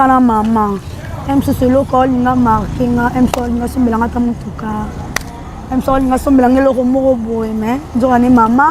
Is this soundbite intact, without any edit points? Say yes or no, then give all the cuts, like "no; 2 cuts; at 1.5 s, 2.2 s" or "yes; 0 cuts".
yes; 0 cuts